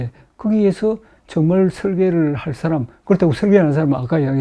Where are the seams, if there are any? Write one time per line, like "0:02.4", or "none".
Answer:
none